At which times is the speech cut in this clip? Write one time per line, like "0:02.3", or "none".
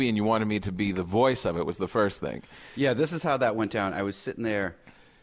0:02.1